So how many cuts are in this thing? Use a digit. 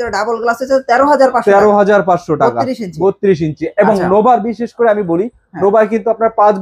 0